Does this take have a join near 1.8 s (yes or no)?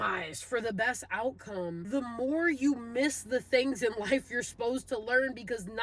yes